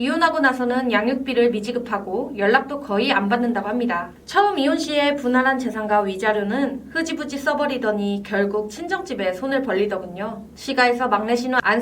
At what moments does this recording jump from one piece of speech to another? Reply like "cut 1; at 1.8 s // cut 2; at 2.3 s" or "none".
cut 1; at 4.2 s // cut 2; at 10.5 s